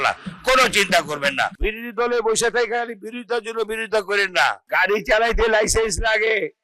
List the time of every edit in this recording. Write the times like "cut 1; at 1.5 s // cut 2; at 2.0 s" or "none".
cut 1; at 1.6 s // cut 2; at 4.6 s